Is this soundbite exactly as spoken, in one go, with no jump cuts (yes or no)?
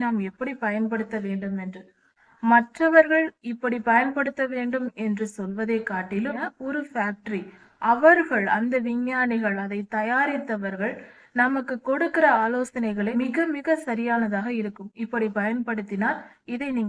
no